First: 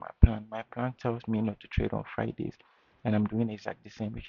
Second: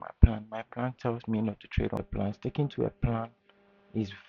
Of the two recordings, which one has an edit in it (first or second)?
second